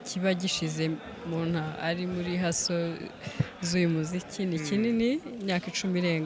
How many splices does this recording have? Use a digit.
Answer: 0